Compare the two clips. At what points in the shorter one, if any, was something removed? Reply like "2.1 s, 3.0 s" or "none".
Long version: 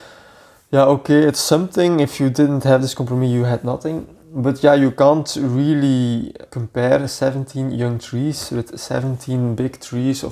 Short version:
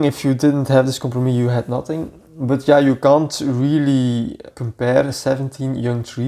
none